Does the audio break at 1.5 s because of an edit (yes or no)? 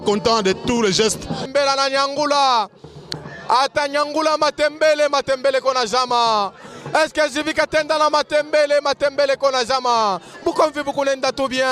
yes